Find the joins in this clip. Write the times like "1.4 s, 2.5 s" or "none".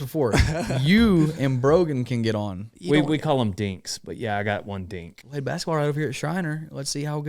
2.7 s, 5.1 s